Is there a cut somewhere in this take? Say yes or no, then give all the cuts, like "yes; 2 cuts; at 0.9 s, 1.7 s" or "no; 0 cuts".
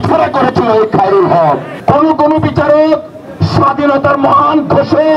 yes; 1 cut; at 1.7 s